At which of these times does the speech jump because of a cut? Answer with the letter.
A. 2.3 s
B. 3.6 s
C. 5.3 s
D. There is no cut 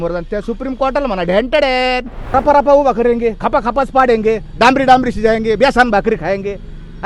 A